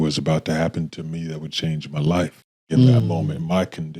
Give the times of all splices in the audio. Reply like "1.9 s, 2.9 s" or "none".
2.7 s